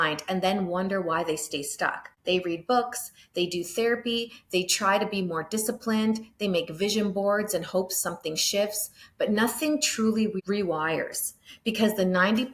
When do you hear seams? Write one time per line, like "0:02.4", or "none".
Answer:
0:02.1
0:10.4